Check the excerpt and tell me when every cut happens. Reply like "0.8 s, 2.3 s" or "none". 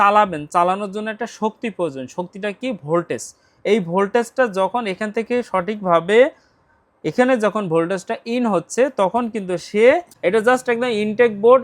10.1 s